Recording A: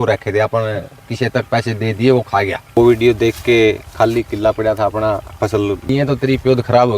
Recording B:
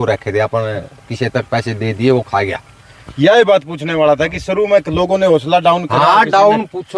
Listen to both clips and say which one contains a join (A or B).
A